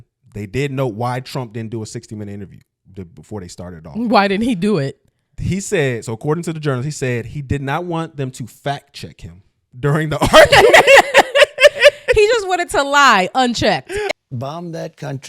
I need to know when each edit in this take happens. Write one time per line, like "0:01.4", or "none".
0:14.1